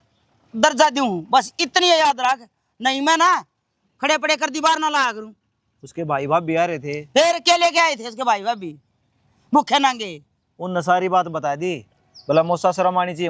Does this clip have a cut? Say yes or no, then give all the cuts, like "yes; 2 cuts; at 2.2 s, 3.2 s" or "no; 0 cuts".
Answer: no; 0 cuts